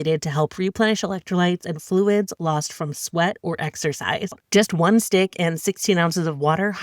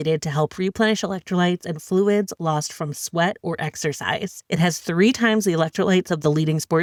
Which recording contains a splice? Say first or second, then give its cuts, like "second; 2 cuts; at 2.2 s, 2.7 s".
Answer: first; 1 cut; at 4.4 s